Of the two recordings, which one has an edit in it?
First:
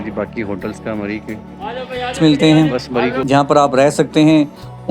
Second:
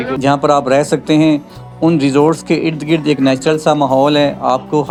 first; 1 cut; at 2.1 s

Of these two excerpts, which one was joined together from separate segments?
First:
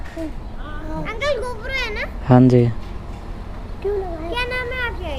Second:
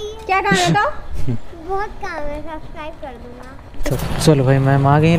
second; 1 cut; at 3.8 s

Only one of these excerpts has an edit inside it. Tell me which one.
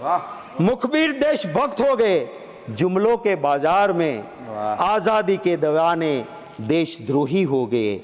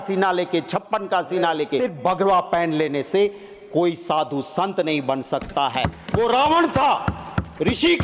second; 1 cut; at 1.8 s

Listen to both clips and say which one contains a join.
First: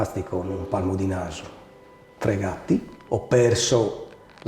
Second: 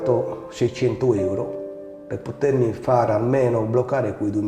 first; 1 cut; at 3.0 s

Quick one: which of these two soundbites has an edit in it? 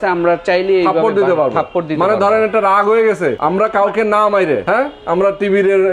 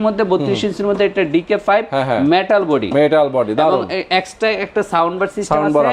first; 2 cuts; at 3.4 s, 4.6 s

